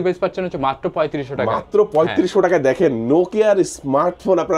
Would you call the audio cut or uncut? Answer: uncut